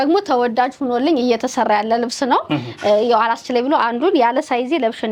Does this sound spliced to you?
no; 0 cuts

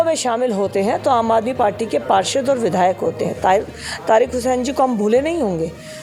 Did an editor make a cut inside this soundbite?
no; 0 cuts

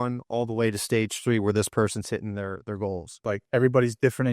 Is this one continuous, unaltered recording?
no; 1 cut; at 3.4 s

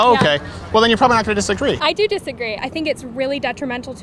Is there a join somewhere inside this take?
yes; 1 cut; at 2.6 s

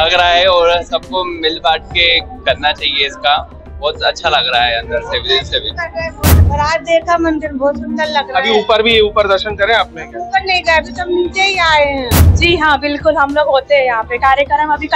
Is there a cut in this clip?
yes; 2 cuts; at 6.3 s, 12.2 s

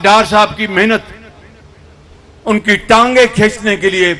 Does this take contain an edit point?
no; 0 cuts

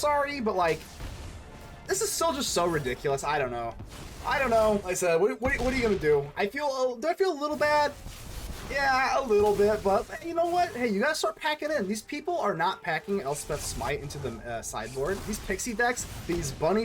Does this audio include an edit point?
yes; 2 cuts; at 4.8 s, 15.2 s

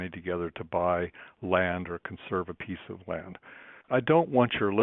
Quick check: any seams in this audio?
yes; 1 cut; at 3.9 s

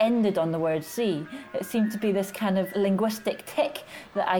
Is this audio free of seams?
yes; 0 cuts

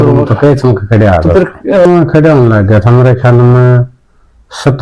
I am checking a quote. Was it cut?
yes; 1 cut; at 1.9 s

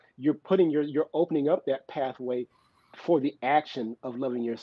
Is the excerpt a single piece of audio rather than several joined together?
yes; 0 cuts

